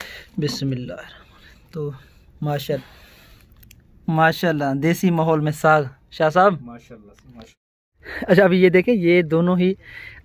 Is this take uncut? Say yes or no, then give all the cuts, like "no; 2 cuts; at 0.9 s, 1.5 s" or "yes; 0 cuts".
no; 2 cuts; at 2.8 s, 7.9 s